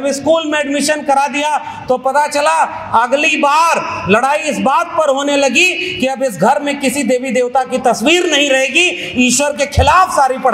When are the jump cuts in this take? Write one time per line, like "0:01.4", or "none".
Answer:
none